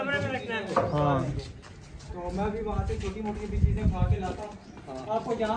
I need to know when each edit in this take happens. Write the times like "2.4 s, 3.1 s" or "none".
none